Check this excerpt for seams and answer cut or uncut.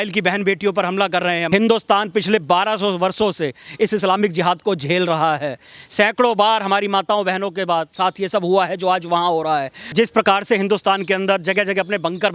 cut